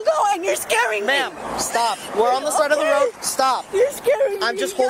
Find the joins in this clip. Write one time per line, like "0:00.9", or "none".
none